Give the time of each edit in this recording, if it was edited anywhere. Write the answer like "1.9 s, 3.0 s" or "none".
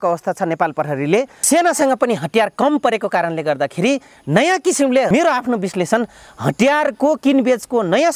1.4 s, 5.1 s